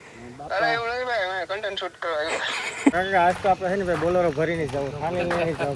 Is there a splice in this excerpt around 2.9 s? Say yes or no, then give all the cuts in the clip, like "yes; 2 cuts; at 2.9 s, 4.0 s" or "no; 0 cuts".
yes; 1 cut; at 2.9 s